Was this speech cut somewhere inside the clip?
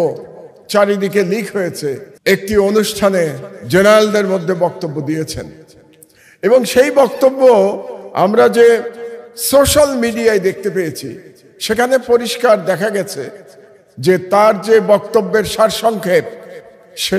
yes; 1 cut; at 2.1 s

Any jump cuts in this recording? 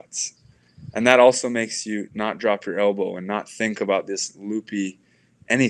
no; 0 cuts

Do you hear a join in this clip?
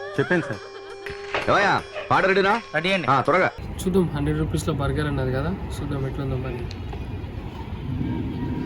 no; 0 cuts

